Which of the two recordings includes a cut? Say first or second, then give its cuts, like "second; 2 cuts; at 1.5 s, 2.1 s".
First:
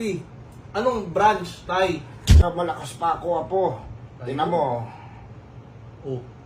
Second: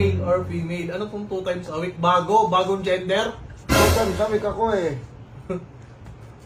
first; 1 cut; at 2.4 s